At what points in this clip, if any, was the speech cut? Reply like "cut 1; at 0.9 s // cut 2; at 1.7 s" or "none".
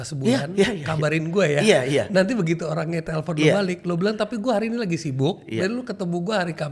none